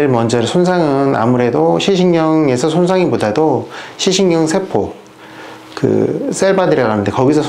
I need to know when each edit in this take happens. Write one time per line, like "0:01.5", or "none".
none